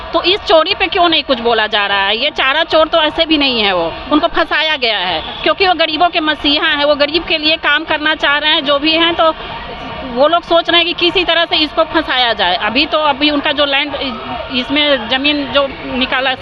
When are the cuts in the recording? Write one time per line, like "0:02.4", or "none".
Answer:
none